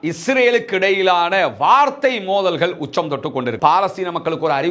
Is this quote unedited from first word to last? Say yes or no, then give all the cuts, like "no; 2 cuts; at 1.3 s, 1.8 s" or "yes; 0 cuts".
no; 1 cut; at 3.5 s